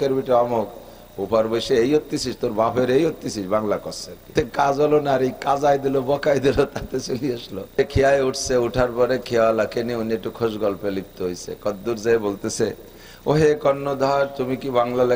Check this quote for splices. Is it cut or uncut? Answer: cut